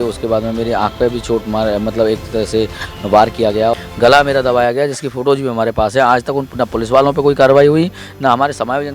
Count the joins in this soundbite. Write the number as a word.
one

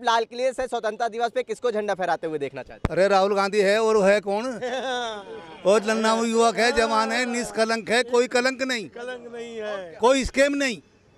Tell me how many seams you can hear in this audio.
zero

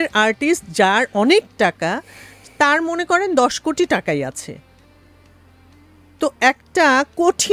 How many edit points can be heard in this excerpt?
zero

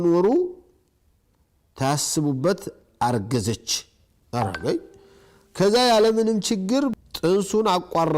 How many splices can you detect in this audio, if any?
one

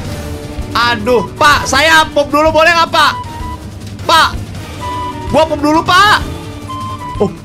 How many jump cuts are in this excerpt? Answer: zero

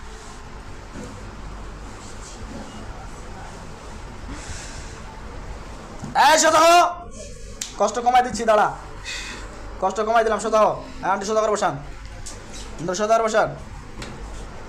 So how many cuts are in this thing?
zero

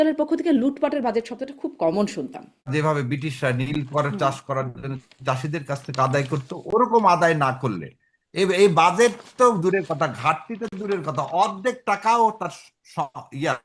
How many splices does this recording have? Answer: one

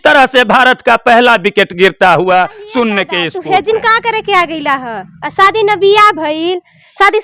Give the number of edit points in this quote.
one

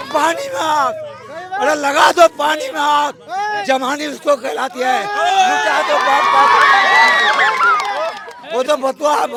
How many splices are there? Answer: zero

